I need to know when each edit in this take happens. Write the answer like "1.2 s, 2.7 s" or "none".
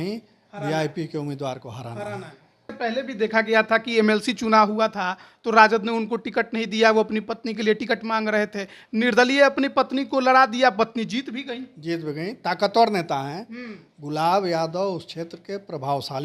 2.8 s